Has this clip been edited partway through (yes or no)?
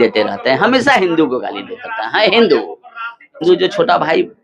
yes